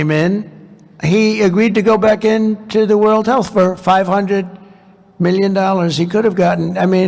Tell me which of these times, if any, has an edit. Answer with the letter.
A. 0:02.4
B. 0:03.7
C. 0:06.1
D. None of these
D